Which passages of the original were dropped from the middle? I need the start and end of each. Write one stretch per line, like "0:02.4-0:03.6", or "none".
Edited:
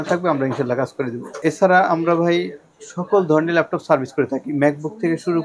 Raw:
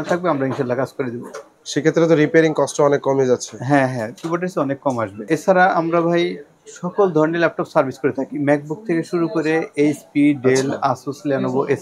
0:01.3-0:05.2